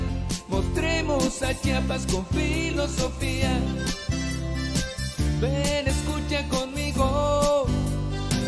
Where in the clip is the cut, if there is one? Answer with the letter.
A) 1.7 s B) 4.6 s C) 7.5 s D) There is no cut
D